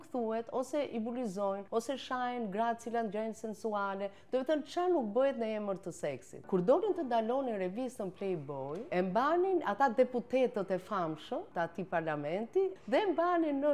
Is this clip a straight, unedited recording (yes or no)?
no